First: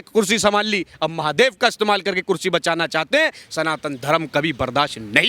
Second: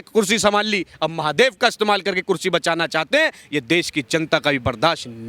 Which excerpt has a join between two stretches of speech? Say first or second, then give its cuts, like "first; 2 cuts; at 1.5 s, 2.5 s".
first; 1 cut; at 3.4 s